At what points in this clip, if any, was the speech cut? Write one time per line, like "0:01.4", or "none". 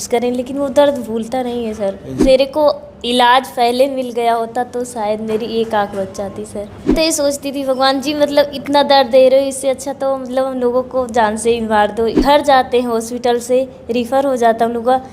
0:02.2
0:06.9
0:12.2